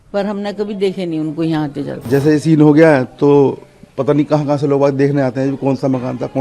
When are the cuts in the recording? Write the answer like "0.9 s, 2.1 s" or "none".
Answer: 2.1 s